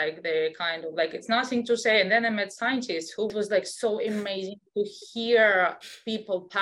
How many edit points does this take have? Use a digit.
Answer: 1